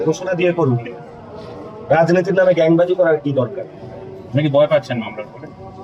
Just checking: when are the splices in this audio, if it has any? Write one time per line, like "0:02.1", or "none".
none